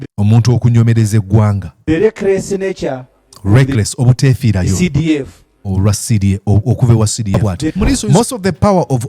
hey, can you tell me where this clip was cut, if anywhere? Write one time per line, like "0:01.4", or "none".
0:08.0